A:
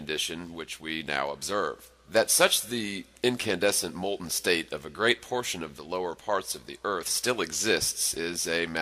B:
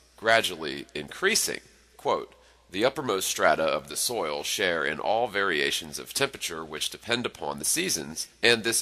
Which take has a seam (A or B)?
A